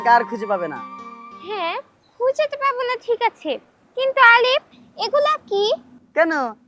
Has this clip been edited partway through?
no; 0 cuts

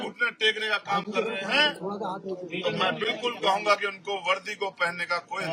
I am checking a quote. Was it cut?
no; 0 cuts

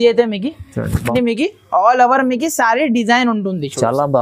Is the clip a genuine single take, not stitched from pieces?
no; 1 cut; at 1.1 s

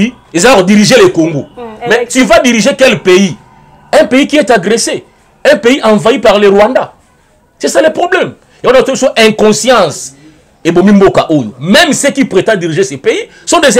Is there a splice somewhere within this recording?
no; 0 cuts

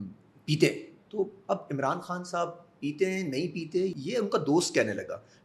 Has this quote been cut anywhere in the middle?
no; 0 cuts

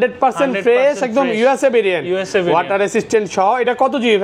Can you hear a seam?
no; 0 cuts

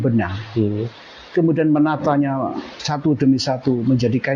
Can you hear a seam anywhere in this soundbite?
no; 0 cuts

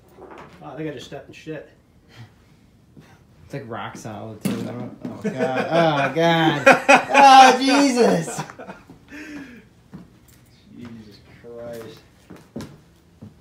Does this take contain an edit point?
no; 0 cuts

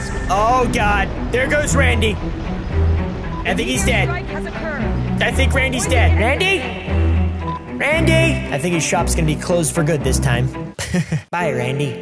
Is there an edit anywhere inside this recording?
no; 0 cuts

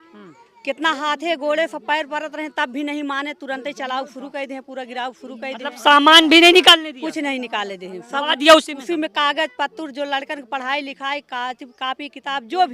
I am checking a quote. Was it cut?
no; 0 cuts

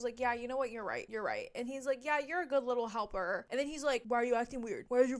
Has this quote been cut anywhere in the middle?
no; 0 cuts

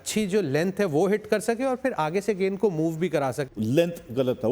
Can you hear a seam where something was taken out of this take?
yes; 1 cut; at 3.4 s

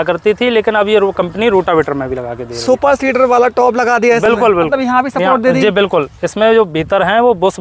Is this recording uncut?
yes; 0 cuts

